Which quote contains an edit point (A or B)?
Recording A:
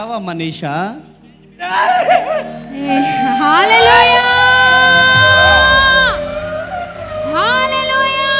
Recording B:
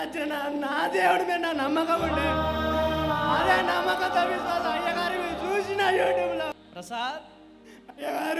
B